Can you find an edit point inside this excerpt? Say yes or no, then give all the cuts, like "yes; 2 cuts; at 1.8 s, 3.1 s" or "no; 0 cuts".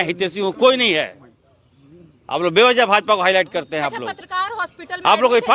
no; 0 cuts